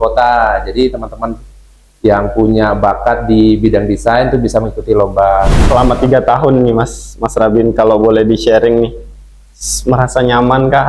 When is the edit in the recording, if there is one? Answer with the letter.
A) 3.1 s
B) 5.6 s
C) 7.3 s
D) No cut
B